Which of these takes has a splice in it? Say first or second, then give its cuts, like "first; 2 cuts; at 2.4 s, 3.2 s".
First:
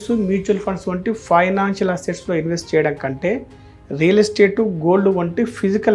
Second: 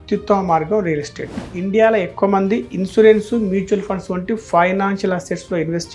second; 1 cut; at 1.4 s